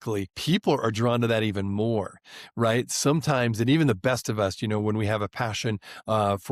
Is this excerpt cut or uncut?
uncut